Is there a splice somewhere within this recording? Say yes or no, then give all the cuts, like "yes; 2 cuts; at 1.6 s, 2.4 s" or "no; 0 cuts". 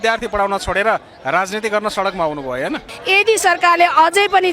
yes; 1 cut; at 2.9 s